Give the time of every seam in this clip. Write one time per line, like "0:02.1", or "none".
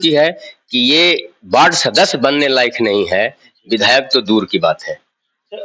none